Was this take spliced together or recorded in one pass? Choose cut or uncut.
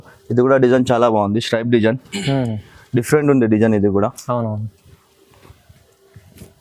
uncut